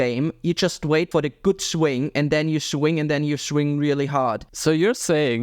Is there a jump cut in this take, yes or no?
yes